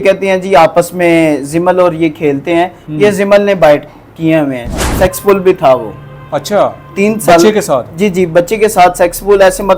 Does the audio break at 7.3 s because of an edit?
no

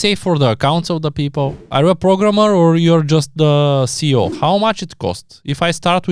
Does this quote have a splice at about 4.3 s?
yes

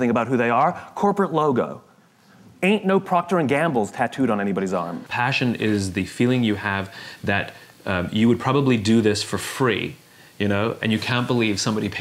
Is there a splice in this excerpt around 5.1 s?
yes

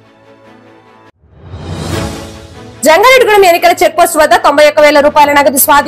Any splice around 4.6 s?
no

